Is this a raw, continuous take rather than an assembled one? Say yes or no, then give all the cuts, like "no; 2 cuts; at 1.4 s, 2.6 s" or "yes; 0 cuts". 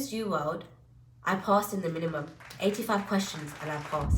yes; 0 cuts